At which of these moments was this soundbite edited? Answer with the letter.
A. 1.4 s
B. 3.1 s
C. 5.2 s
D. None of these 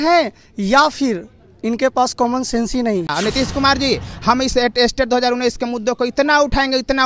B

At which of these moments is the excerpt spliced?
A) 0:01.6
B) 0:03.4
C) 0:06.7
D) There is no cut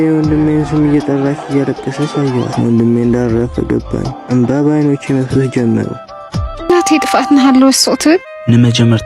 C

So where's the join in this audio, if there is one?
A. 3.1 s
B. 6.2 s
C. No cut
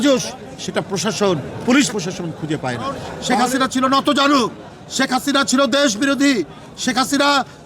A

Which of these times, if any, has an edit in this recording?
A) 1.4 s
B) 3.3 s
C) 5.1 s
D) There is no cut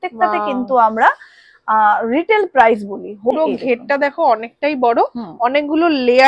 B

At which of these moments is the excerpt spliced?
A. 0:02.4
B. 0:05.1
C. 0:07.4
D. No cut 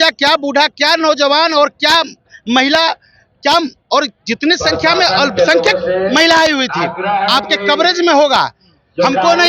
D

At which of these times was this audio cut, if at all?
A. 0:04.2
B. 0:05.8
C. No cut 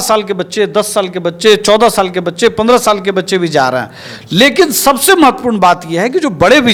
C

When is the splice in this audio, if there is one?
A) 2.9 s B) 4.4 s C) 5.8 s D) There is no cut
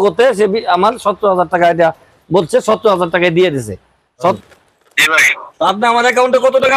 B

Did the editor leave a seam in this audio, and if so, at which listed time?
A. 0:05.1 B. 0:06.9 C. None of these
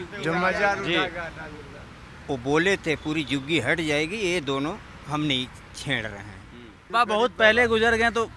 B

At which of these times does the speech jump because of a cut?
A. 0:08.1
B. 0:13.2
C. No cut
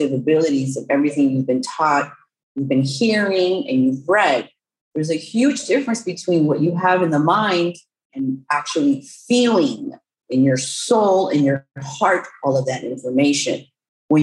A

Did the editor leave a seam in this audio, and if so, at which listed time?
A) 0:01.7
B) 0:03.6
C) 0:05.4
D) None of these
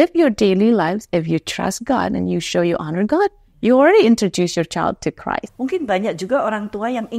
C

